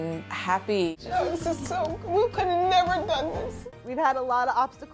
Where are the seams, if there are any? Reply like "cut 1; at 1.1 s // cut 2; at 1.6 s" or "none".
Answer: cut 1; at 0.9 s // cut 2; at 3.6 s